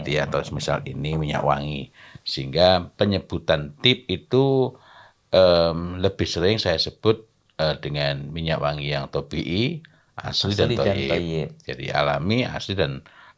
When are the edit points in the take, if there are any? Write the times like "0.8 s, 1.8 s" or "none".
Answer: none

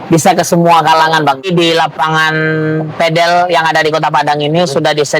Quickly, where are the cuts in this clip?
1.4 s

